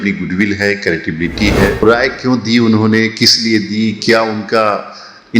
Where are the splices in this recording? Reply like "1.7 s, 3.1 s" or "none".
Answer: 1.8 s